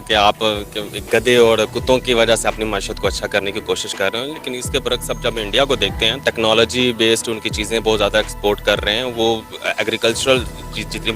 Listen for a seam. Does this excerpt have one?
yes; 1 cut; at 6.2 s

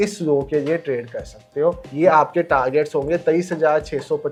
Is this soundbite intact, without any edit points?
yes; 0 cuts

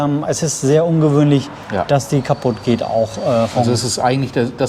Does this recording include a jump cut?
no; 0 cuts

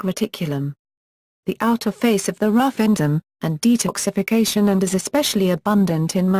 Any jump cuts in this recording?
no; 0 cuts

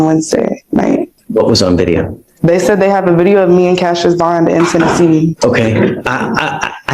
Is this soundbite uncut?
no; 2 cuts; at 1.2 s, 5.4 s

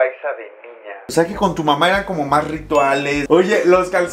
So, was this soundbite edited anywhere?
yes; 2 cuts; at 1.0 s, 3.2 s

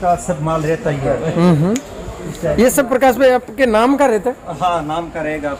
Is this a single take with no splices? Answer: yes; 0 cuts

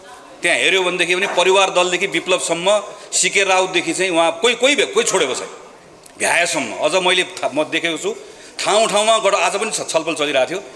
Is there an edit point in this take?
no; 0 cuts

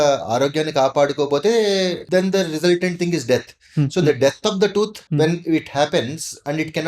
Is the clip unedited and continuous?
no; 2 cuts; at 2.0 s, 5.0 s

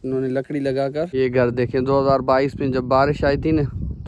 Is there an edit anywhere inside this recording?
yes; 1 cut; at 1.0 s

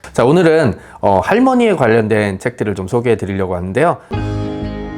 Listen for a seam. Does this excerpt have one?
yes; 1 cut; at 4.1 s

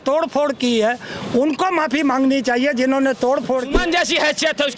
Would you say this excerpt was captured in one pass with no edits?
no; 1 cut; at 3.8 s

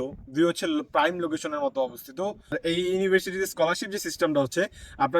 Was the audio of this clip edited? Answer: yes; 1 cut; at 2.6 s

